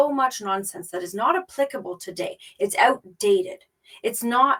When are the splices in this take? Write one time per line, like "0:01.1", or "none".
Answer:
none